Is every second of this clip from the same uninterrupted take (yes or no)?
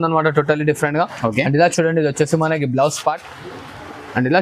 yes